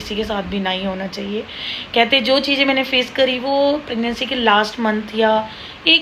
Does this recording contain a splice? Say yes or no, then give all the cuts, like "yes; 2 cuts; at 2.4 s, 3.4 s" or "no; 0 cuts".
no; 0 cuts